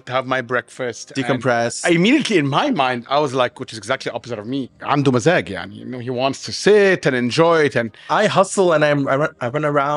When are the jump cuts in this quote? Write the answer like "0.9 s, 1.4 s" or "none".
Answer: 1.8 s, 4.8 s, 8.1 s

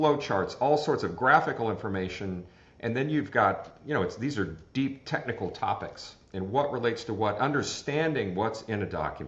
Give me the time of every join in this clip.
none

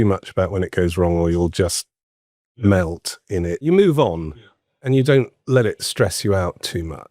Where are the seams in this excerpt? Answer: 3.6 s, 4.8 s

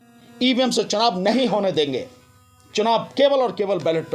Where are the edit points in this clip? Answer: none

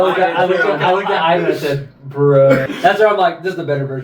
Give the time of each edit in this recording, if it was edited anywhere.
2.6 s

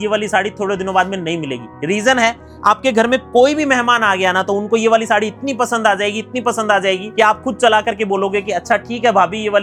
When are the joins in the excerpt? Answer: none

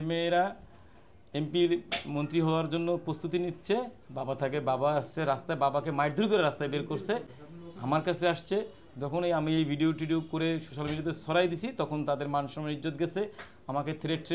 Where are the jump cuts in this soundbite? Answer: none

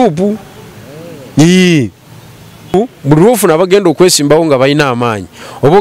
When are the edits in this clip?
2.7 s

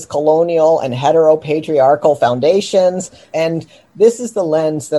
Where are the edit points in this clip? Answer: 3.2 s

